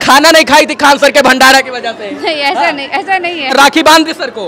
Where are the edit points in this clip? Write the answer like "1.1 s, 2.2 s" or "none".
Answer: 3.5 s